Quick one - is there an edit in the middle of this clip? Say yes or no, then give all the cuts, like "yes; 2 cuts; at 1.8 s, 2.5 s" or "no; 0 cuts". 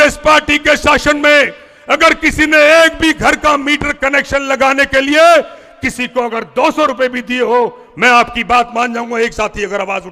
no; 0 cuts